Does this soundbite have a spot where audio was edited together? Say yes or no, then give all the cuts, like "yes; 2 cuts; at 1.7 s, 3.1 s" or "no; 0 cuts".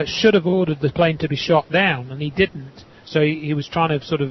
yes; 1 cut; at 2.9 s